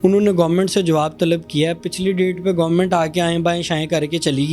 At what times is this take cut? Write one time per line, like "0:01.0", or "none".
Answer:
none